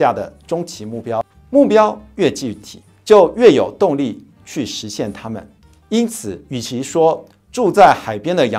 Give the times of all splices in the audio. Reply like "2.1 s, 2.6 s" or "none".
1.4 s